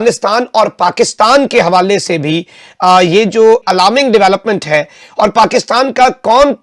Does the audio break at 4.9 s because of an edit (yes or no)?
no